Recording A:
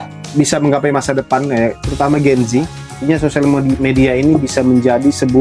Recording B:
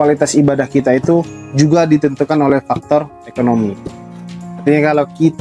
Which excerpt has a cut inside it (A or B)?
A